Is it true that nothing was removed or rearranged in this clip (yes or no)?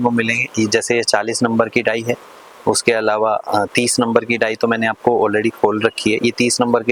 yes